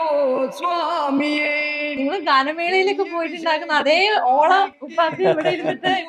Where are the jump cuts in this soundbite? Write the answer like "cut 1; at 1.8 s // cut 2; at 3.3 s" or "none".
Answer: cut 1; at 1.9 s // cut 2; at 4.8 s

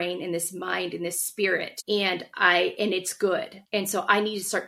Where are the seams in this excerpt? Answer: none

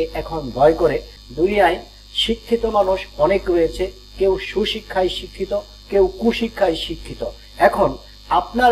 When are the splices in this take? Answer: cut 1; at 1.1 s

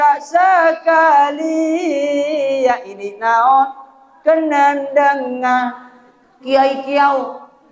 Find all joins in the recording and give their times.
cut 1; at 6.4 s

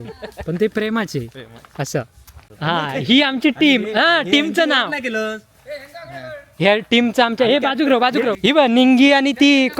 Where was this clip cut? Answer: cut 1; at 2.4 s // cut 2; at 8.4 s

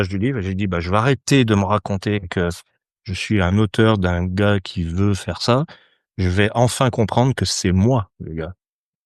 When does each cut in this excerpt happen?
none

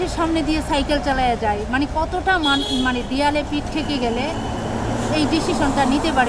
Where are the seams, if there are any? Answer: none

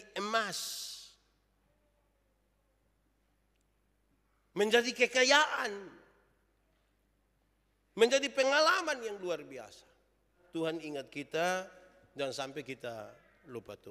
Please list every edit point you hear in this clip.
cut 1; at 10.3 s

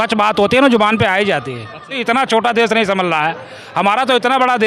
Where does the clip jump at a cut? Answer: cut 1; at 2.0 s

